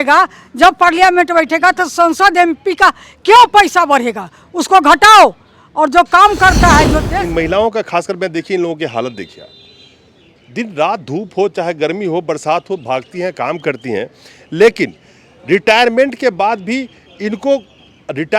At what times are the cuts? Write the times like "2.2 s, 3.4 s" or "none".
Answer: 7.0 s